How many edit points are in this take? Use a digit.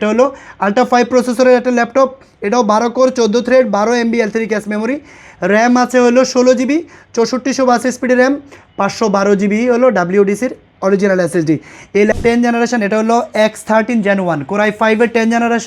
1